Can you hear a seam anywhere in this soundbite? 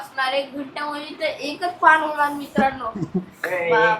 no; 0 cuts

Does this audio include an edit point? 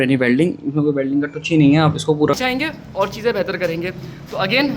yes; 1 cut; at 2.4 s

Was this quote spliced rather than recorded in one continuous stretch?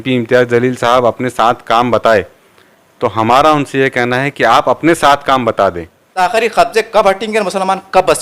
yes; 1 cut; at 6.0 s

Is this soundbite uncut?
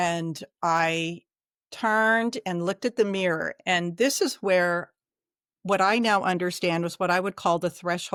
yes; 0 cuts

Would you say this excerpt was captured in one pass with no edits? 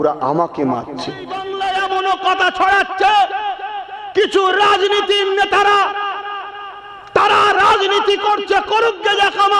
no; 1 cut; at 1.4 s

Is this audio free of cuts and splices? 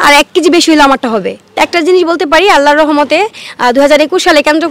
no; 1 cut; at 1.6 s

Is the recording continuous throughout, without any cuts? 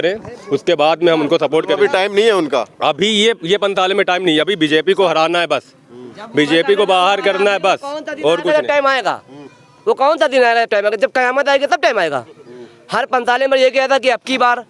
yes; 0 cuts

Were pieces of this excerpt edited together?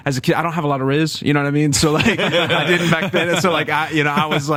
no; 0 cuts

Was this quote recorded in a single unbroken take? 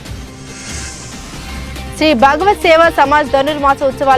yes; 0 cuts

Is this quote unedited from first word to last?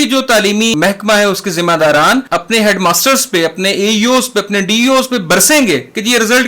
no; 2 cuts; at 0.7 s, 2.3 s

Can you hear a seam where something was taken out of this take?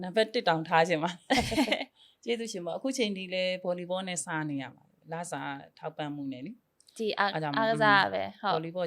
no; 0 cuts

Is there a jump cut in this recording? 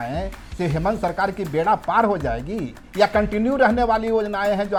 no; 0 cuts

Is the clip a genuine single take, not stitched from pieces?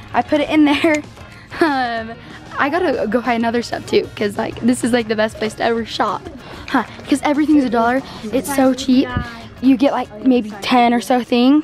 yes; 0 cuts

